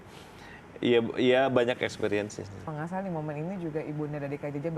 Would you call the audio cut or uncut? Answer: cut